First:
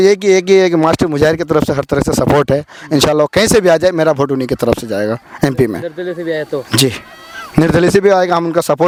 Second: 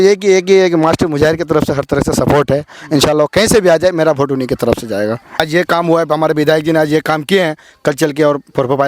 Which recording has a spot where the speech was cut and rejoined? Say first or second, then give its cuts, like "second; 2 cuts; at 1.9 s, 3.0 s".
second; 1 cut; at 5.4 s